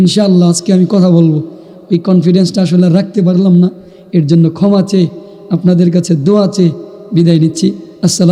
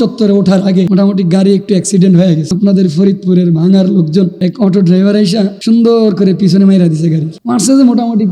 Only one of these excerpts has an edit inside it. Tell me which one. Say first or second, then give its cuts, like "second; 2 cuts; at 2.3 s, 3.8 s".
second; 5 cuts; at 0.9 s, 2.5 s, 4.4 s, 5.6 s, 7.3 s